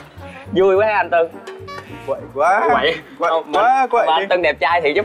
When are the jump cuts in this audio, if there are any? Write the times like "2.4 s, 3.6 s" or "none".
none